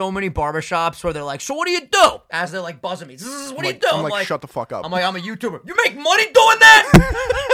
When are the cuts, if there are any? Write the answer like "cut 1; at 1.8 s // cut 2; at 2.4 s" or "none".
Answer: cut 1; at 2.2 s